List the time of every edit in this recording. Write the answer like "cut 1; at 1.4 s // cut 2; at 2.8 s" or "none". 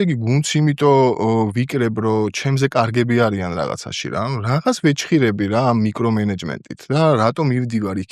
none